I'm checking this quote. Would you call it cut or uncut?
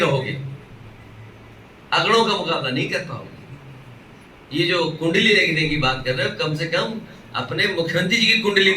uncut